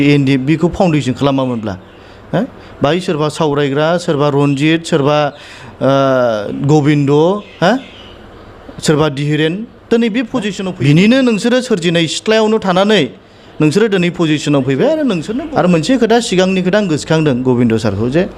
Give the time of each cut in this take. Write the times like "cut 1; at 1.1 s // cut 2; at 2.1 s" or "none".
cut 1; at 10.6 s // cut 2; at 15.3 s